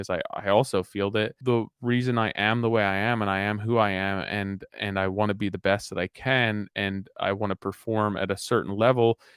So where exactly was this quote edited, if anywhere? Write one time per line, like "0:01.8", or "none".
0:01.3